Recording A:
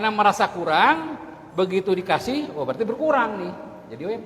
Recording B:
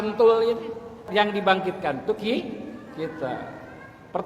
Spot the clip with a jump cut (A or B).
B